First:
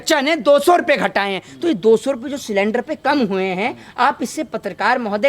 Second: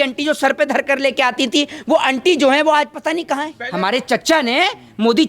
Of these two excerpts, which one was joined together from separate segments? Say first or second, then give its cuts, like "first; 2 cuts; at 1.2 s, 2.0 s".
second; 1 cut; at 3.6 s